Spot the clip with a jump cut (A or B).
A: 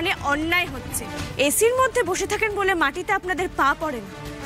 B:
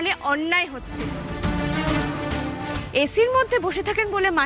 A